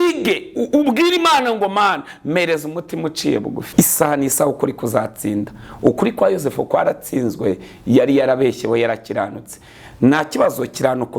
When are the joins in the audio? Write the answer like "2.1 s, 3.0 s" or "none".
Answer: 3.6 s